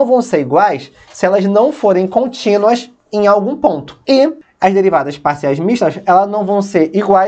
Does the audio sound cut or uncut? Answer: cut